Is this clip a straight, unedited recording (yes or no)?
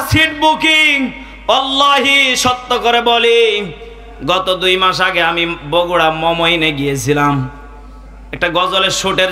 yes